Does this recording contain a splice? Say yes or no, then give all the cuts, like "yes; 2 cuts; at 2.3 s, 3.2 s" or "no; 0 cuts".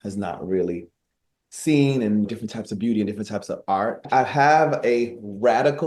yes; 1 cut; at 4.0 s